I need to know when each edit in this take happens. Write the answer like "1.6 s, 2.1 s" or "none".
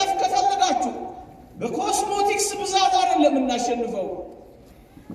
none

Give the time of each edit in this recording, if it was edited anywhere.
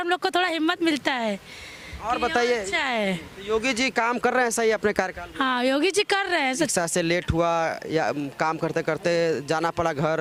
none

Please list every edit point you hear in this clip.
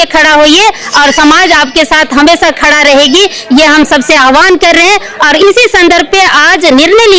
none

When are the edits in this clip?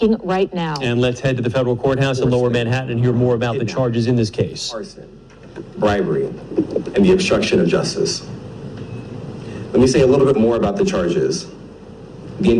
3.3 s

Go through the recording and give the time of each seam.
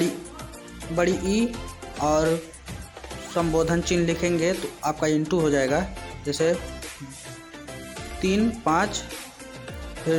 none

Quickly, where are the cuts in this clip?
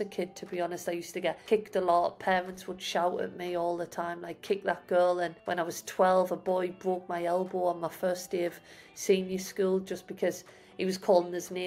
1.4 s, 5.4 s

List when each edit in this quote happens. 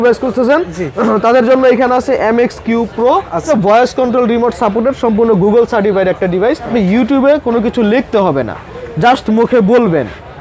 3.5 s, 6.7 s

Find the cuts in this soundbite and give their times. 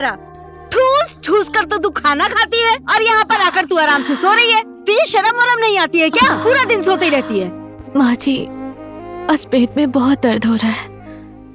none

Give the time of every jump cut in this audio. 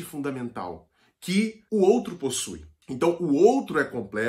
none

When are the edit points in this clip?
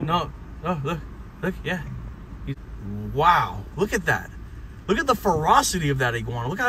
2.6 s

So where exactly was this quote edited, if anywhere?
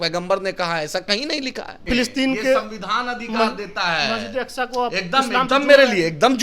1.8 s

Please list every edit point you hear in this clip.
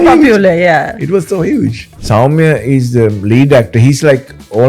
1.9 s

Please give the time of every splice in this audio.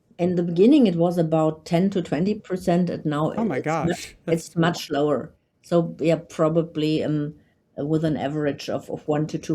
none

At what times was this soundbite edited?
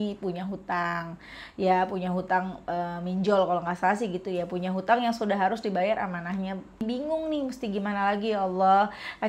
6.8 s

